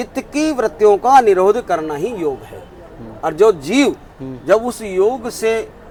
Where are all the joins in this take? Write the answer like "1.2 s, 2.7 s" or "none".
none